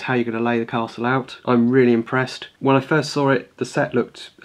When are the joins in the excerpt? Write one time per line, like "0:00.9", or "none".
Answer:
0:01.4
0:02.4

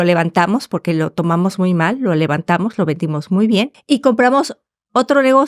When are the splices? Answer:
0:03.8

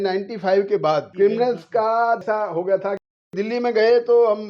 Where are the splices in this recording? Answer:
0:01.1
0:02.2
0:03.3

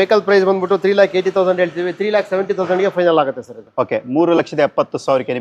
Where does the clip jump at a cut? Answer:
none

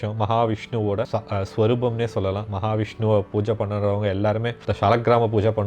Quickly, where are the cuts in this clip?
0:01.1
0:04.6

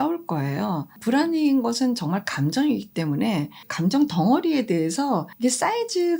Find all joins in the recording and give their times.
0:05.3

